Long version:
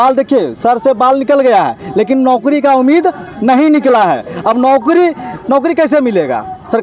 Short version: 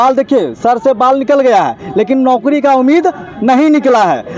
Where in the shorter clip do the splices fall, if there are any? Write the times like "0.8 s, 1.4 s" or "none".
none